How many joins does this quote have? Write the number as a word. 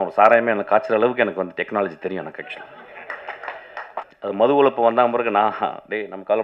one